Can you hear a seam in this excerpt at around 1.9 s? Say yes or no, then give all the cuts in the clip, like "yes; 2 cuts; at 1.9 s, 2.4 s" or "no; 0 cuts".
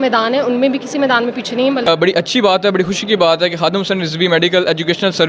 yes; 1 cut; at 1.9 s